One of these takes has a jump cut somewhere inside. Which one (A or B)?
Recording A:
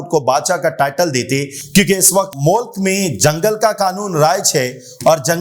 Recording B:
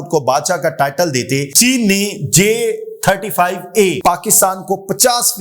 B